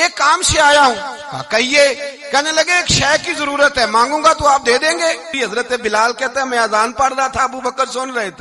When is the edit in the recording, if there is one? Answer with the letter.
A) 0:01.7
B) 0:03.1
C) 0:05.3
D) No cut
C